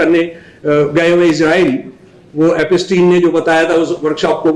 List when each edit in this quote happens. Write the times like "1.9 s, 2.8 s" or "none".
none